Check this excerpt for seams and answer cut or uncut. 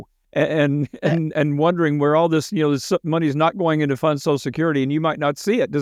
uncut